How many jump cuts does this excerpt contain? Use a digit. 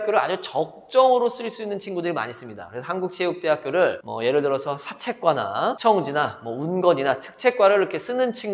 0